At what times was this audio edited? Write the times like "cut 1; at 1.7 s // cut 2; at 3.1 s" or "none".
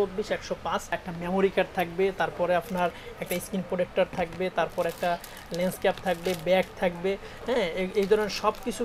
cut 1; at 1.0 s